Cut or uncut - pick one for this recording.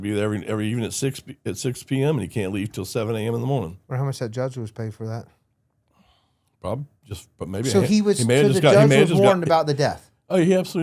uncut